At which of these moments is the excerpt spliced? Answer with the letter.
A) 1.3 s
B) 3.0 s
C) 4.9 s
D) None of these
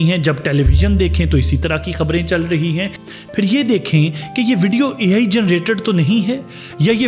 B